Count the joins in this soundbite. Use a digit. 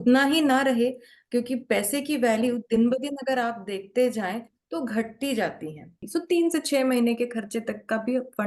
1